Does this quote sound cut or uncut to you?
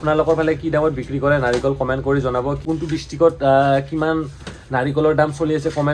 cut